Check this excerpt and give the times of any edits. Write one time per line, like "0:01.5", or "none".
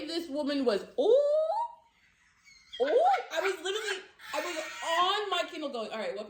none